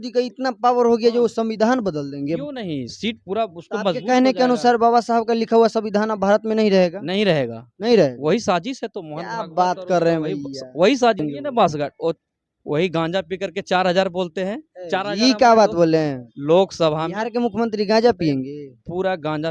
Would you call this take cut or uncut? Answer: cut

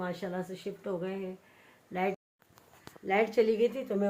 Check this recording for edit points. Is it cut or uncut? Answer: cut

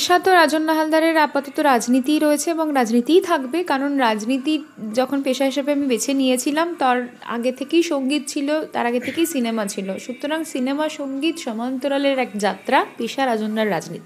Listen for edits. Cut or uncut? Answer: uncut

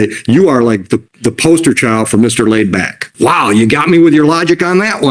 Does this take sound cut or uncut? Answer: cut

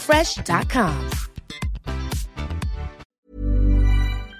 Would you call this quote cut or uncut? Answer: cut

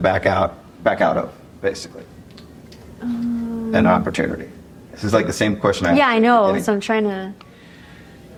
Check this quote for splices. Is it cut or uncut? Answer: uncut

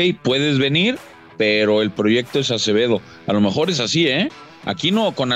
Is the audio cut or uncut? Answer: uncut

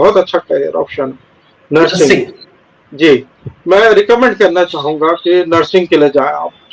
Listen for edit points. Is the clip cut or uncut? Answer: uncut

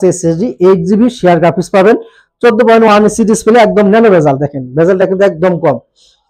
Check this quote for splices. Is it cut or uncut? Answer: uncut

